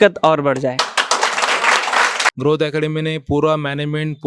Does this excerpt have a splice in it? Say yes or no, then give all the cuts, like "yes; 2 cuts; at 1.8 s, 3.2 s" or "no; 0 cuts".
yes; 1 cut; at 2.3 s